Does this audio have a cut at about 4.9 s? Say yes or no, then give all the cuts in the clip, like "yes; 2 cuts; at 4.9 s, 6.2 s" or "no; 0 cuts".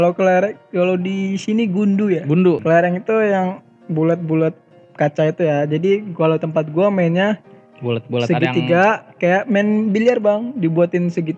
no; 1 cut; at 2.6 s